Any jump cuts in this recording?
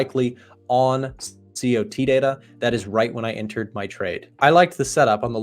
yes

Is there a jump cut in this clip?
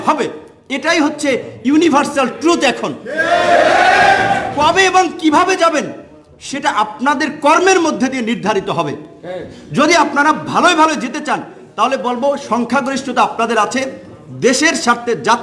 no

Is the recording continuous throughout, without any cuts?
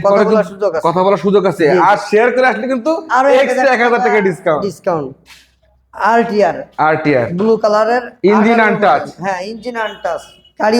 yes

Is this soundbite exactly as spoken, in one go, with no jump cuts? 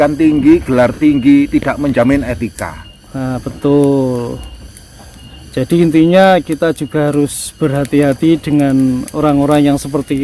yes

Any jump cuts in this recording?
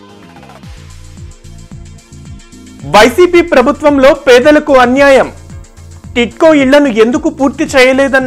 no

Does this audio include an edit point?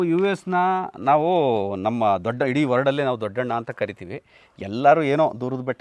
no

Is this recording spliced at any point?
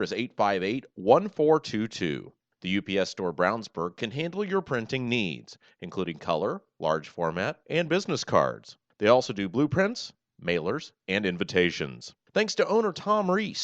no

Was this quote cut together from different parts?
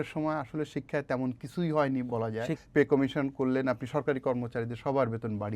yes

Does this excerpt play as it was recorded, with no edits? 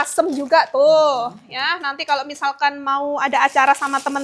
yes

